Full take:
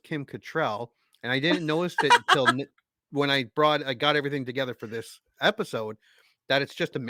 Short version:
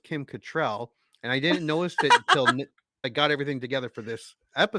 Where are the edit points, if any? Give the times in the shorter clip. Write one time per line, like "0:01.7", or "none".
0:03.0